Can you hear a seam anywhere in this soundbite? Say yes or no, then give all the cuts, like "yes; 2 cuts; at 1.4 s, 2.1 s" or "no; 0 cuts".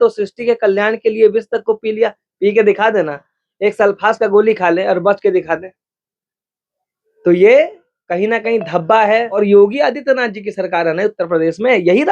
yes; 1 cut; at 9.4 s